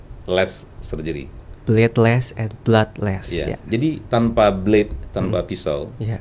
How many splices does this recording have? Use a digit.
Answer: 0